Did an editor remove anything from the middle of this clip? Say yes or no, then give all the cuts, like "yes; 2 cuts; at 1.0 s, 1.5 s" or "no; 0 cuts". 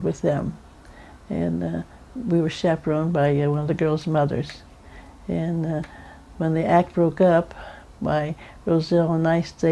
yes; 1 cut; at 1.6 s